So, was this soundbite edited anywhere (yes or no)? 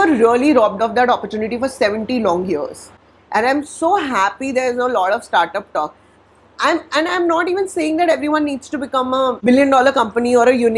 no